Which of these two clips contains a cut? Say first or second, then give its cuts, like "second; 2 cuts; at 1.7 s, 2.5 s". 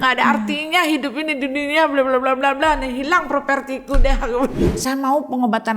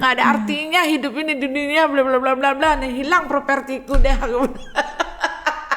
first; 1 cut; at 4.6 s